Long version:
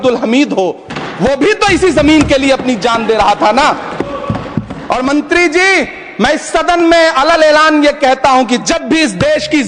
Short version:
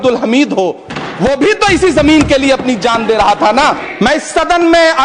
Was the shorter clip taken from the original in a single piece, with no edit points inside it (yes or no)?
no